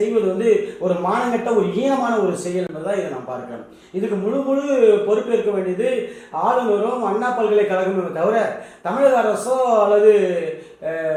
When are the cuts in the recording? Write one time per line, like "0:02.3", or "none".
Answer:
none